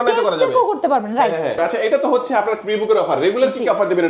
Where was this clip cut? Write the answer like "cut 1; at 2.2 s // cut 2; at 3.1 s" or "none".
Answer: cut 1; at 1.6 s